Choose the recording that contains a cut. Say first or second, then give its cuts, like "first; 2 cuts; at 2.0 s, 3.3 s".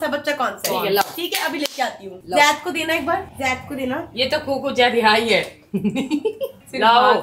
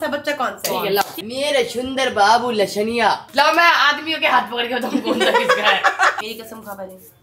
second; 3 cuts; at 1.2 s, 3.3 s, 6.2 s